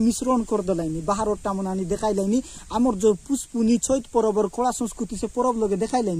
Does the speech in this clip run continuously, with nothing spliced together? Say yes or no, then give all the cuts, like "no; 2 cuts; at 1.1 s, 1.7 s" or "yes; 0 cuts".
yes; 0 cuts